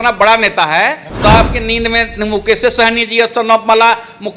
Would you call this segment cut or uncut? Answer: cut